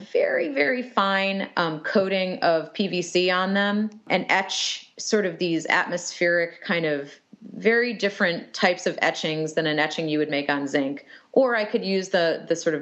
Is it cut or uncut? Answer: cut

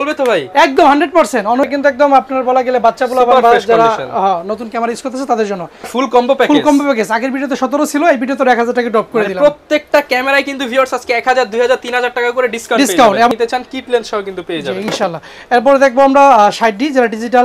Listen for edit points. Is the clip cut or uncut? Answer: cut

